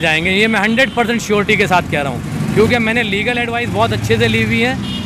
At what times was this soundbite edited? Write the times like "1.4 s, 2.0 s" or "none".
none